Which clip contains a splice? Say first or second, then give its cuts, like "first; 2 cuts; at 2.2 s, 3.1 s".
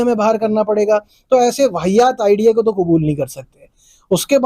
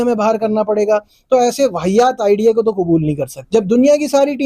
second; 1 cut; at 3.4 s